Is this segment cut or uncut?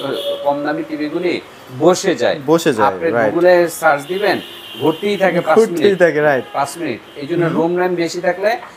uncut